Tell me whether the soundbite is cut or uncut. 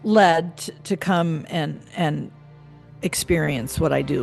uncut